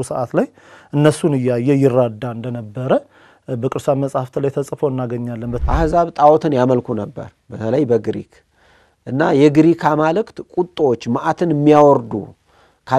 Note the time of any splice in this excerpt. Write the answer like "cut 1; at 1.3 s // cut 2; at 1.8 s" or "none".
cut 1; at 5.5 s